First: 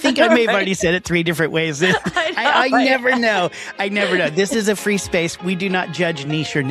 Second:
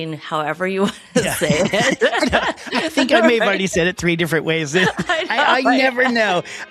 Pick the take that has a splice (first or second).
first